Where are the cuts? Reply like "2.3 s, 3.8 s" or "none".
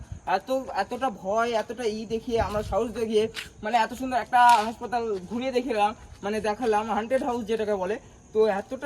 none